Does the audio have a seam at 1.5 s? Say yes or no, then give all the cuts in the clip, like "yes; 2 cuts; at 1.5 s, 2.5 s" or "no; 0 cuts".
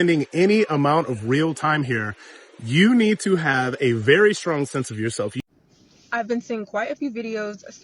no; 1 cut; at 5.3 s